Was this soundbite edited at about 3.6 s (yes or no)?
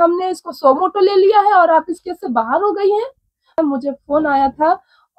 yes